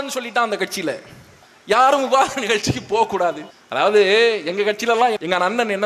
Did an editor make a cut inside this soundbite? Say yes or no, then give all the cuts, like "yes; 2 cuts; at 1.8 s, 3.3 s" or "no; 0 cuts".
no; 0 cuts